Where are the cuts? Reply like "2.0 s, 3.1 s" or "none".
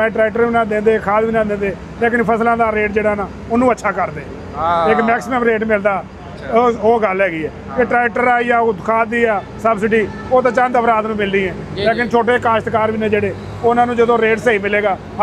none